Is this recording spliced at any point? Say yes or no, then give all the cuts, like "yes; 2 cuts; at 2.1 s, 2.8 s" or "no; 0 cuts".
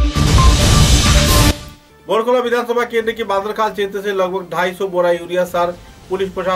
yes; 1 cut; at 1.7 s